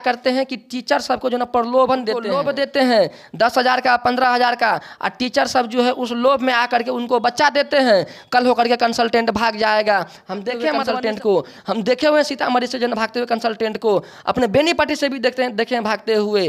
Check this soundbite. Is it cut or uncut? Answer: uncut